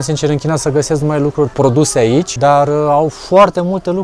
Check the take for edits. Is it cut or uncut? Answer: cut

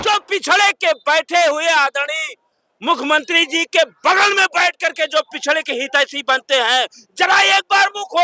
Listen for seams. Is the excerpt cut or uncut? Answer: uncut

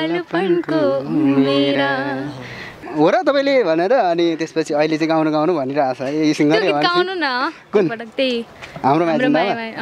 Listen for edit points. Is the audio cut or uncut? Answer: cut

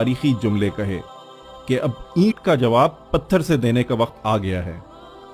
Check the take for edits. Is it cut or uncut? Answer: cut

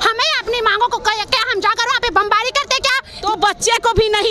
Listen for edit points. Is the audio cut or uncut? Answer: cut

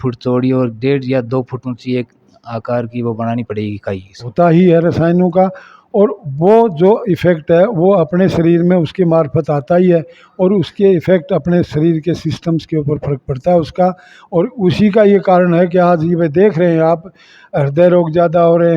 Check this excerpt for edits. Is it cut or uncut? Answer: cut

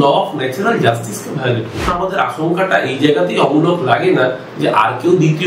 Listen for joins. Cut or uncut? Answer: cut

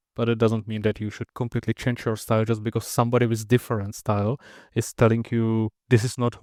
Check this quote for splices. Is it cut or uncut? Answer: uncut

